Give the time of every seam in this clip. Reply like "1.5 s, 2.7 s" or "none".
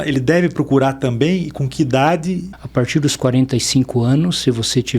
2.5 s